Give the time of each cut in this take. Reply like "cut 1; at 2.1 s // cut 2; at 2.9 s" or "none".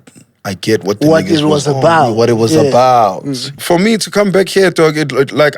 cut 1; at 3.6 s